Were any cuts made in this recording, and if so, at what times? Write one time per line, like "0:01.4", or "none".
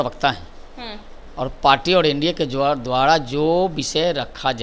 none